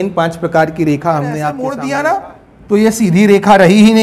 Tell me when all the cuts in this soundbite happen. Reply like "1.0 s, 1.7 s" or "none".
1.6 s